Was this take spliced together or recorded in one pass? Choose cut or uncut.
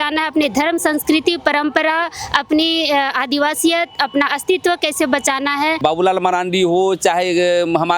cut